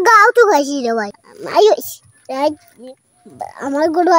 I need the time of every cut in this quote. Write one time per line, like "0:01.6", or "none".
0:01.1